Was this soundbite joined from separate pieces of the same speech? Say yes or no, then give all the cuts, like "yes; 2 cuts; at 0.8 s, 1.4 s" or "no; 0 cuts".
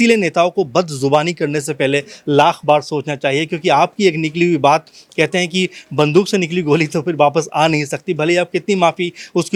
no; 0 cuts